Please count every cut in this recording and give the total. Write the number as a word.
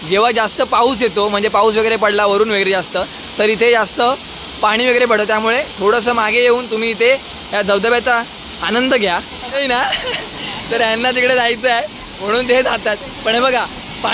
one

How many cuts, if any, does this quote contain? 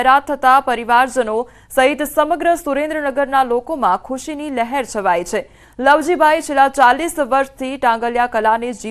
one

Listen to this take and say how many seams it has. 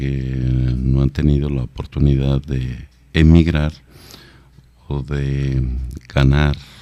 one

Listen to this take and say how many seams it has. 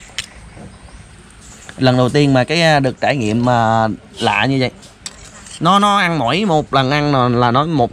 one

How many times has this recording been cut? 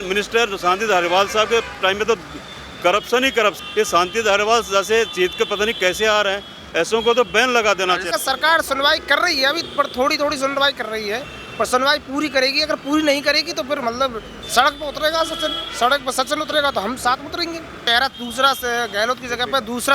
three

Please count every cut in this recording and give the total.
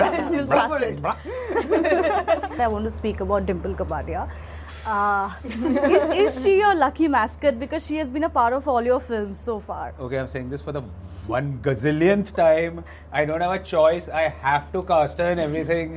one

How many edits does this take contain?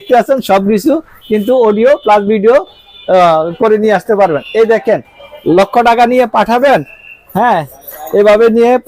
zero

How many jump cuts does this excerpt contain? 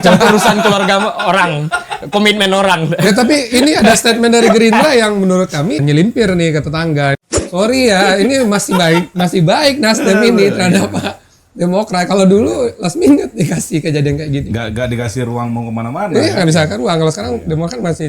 two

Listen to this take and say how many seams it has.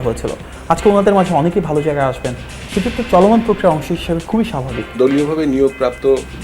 one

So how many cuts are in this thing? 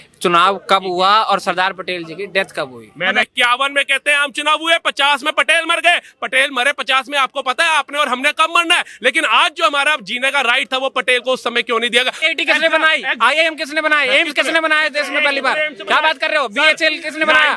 two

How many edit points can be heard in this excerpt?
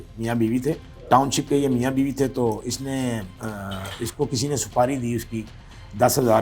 one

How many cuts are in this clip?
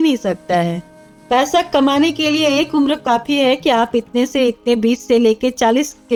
zero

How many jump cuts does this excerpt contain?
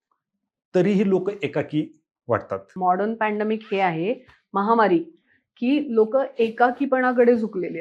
one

